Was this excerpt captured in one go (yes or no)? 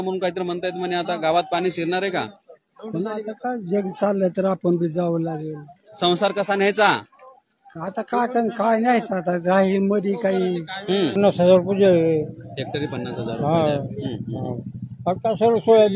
no